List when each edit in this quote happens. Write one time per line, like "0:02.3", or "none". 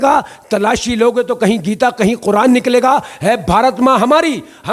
none